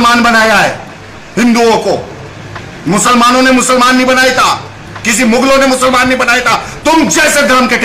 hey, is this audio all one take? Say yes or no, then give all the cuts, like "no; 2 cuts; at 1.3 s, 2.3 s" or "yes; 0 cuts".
yes; 0 cuts